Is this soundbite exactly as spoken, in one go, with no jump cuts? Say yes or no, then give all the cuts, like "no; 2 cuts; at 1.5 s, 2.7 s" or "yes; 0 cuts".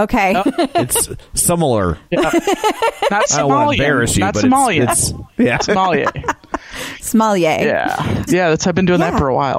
yes; 0 cuts